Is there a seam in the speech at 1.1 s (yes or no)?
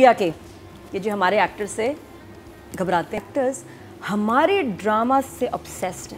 no